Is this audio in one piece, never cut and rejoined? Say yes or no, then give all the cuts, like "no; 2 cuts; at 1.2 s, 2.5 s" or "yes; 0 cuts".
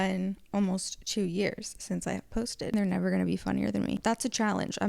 no; 2 cuts; at 2.7 s, 4.0 s